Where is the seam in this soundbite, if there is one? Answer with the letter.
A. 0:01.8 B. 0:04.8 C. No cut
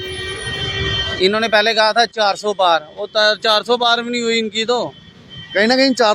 C